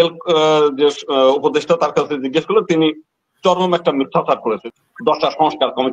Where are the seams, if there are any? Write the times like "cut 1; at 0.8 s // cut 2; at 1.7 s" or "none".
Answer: cut 1; at 4.6 s